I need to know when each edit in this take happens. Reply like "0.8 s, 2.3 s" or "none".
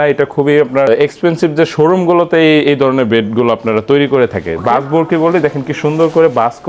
none